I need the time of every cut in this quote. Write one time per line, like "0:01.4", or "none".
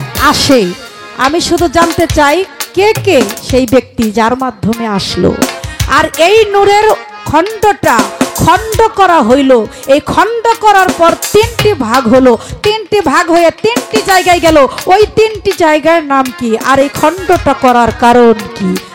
none